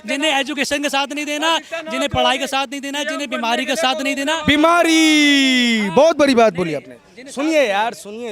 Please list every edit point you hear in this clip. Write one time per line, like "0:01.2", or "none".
none

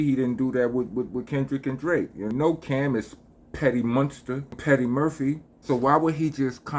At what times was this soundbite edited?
0:02.3
0:04.6
0:05.5

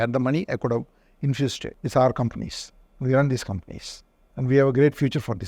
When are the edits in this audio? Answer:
0:01.7

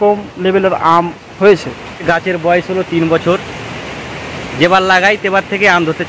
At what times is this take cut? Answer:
0:02.0

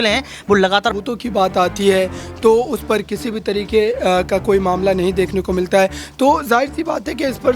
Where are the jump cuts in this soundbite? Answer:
0:00.9
0:03.9

